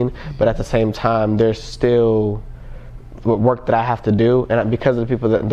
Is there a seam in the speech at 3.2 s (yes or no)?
no